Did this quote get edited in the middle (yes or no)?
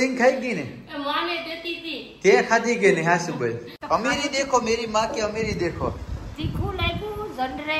yes